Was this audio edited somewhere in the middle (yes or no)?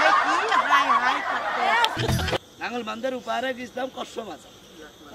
yes